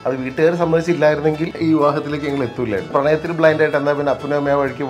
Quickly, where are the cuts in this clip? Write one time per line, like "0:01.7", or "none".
0:01.5
0:02.9